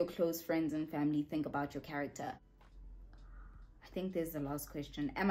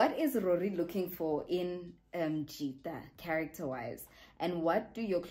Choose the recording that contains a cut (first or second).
first